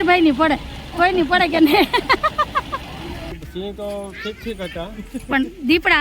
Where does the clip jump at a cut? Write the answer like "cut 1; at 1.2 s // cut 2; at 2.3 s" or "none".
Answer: cut 1; at 3.4 s